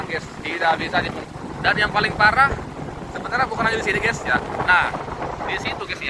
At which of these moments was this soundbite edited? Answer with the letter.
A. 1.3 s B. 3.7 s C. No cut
A